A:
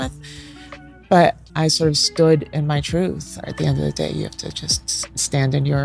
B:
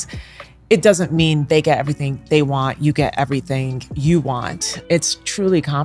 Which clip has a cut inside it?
A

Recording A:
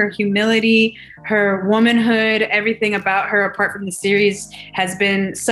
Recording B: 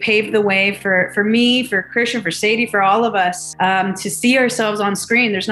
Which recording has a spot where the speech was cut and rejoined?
B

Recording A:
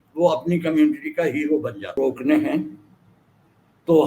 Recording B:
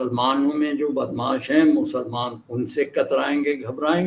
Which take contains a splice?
A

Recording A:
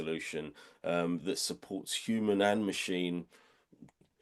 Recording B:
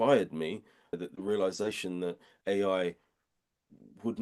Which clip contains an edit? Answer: B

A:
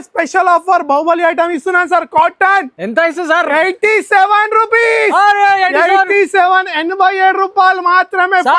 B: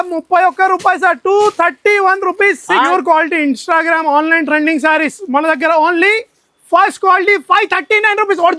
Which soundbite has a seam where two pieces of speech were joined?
B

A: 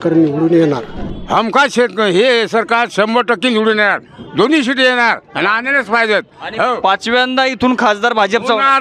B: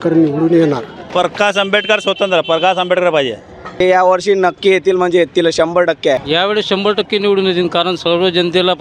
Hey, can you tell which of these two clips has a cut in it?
A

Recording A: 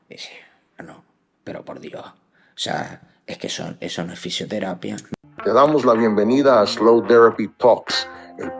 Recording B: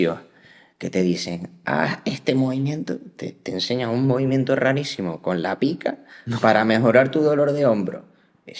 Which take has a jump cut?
A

